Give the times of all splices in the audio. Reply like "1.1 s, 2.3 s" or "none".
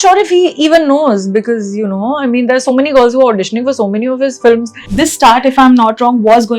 4.8 s